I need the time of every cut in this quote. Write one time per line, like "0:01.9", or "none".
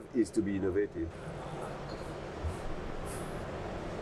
0:01.1